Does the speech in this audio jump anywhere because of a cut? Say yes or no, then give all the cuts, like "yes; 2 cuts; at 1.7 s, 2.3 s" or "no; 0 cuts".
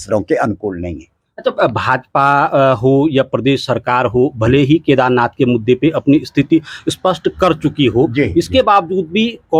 no; 0 cuts